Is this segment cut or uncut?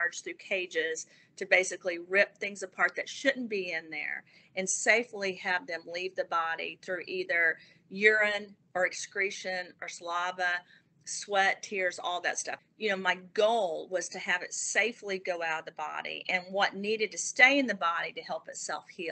cut